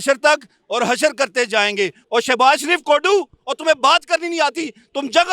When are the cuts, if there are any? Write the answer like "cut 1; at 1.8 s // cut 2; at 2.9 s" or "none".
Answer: cut 1; at 2.0 s